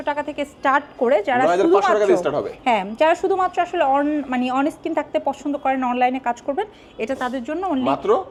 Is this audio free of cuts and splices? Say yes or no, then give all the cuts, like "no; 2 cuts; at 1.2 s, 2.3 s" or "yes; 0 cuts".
yes; 0 cuts